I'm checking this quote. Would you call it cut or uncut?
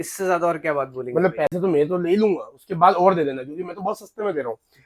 uncut